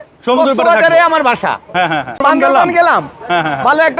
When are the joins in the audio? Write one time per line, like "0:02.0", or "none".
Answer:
0:02.2